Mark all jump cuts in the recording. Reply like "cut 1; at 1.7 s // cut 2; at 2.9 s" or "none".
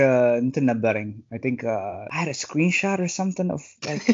cut 1; at 2.0 s